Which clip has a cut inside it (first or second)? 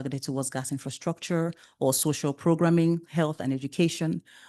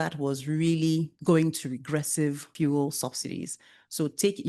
second